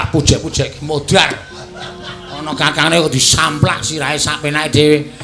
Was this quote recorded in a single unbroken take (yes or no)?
yes